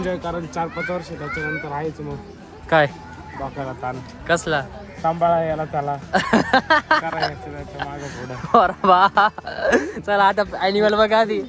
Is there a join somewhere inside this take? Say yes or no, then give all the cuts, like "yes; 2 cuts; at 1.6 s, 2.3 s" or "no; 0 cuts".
no; 0 cuts